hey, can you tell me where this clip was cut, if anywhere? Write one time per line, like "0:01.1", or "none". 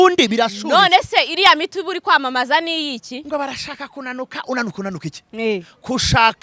0:03.1